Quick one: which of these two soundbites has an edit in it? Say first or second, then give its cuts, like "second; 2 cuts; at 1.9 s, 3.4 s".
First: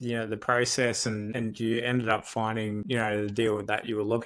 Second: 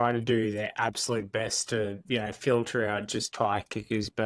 first; 2 cuts; at 1.3 s, 2.8 s